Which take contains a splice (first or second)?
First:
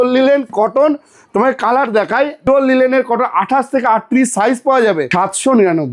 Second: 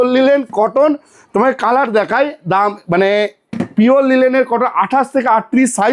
first